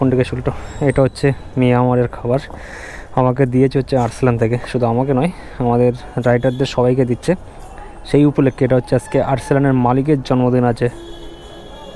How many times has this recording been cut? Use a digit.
0